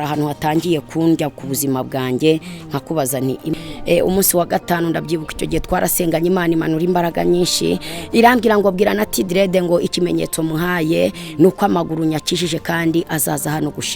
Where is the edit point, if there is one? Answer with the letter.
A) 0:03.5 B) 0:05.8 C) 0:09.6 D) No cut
A